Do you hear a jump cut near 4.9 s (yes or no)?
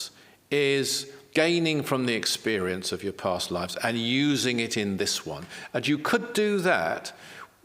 no